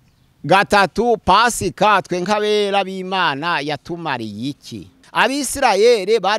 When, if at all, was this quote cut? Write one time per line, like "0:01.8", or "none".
0:05.0